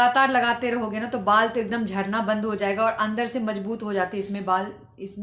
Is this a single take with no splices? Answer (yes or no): yes